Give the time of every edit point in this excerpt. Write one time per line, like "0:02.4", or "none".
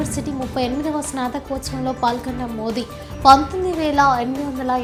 none